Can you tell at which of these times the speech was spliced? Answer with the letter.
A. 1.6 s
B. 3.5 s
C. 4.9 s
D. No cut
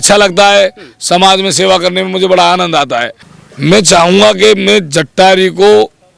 B